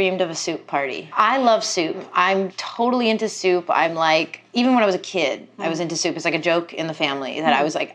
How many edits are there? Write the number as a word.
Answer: one